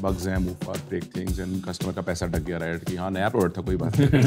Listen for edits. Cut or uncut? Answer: uncut